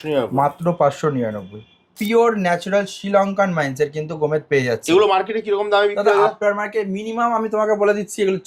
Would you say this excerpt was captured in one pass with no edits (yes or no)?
no